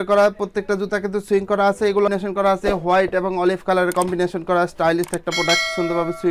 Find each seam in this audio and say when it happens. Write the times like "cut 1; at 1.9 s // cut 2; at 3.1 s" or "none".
cut 1; at 2.1 s